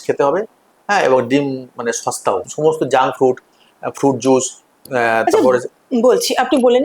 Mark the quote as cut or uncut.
cut